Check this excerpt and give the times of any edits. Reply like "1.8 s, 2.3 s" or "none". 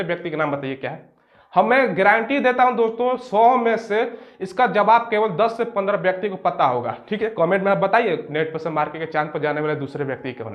none